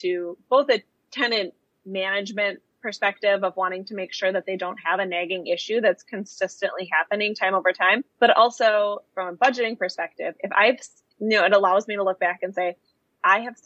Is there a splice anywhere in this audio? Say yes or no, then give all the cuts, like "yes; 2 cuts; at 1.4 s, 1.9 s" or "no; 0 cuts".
yes; 2 cuts; at 1.0 s, 8.1 s